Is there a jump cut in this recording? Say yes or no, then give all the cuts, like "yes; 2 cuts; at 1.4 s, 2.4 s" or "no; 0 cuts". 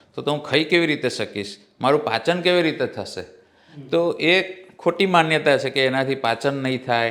no; 0 cuts